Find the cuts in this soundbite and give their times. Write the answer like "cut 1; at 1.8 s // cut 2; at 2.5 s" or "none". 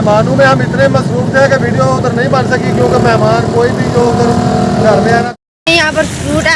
cut 1; at 5.3 s